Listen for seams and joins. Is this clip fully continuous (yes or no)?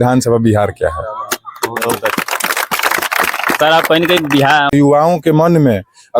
no